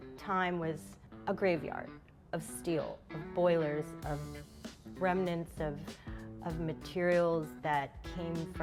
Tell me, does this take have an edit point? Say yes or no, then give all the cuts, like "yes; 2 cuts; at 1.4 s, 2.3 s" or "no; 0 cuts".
no; 0 cuts